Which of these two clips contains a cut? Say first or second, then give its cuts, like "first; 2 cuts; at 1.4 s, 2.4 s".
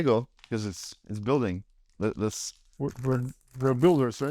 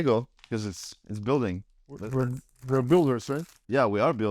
second; 1 cut; at 2.0 s